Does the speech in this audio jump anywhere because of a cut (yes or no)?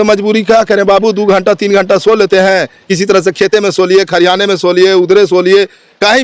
no